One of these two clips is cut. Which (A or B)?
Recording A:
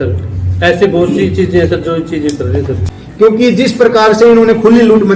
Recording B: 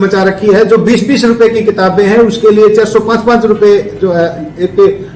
A